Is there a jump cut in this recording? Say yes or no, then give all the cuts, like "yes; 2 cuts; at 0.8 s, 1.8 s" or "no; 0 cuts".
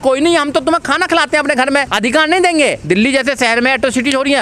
yes; 2 cuts; at 1.9 s, 2.8 s